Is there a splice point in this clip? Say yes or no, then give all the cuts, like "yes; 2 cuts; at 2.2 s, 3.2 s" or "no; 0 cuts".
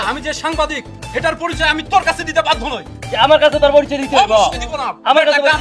no; 0 cuts